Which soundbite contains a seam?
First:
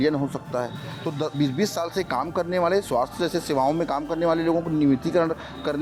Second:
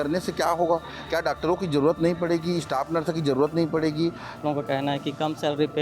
second; 1 cut; at 4.4 s

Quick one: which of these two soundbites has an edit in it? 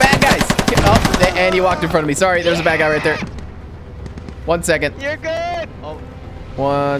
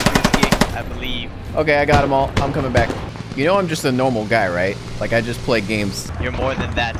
second; 3 cuts; at 3.1 s, 4.9 s, 6.2 s

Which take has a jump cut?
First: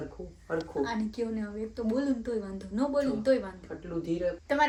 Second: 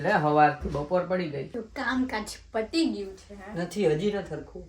second; 1 cut; at 1.5 s

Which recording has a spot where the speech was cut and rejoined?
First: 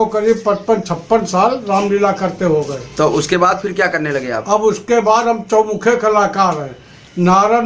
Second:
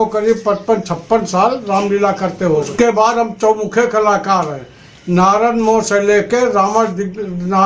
second; 1 cut; at 2.7 s

